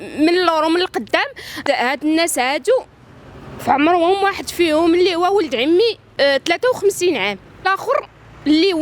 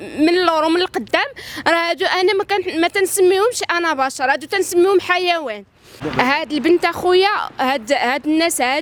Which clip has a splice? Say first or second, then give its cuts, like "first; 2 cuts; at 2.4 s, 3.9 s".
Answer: first; 3 cuts; at 1.6 s, 6.0 s, 7.7 s